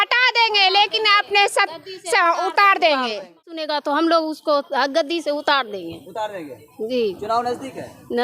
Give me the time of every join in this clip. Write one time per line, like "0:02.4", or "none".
0:03.5